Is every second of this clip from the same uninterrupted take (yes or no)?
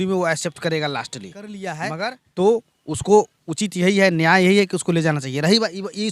no